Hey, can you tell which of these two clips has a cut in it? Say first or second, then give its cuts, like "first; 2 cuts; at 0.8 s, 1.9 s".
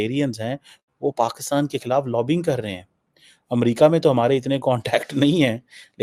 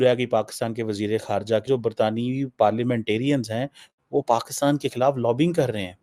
second; 1 cut; at 1.6 s